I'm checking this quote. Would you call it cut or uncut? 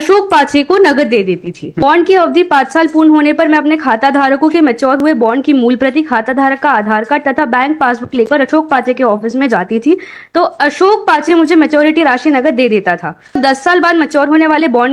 cut